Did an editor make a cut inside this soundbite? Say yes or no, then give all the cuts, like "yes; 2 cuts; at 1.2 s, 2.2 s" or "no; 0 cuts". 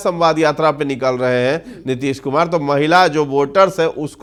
no; 0 cuts